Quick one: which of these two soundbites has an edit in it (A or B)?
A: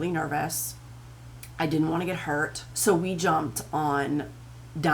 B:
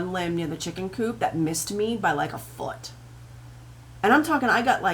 A